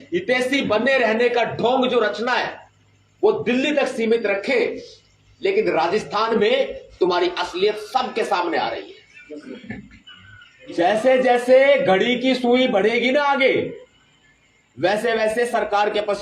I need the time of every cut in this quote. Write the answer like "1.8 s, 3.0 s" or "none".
9.3 s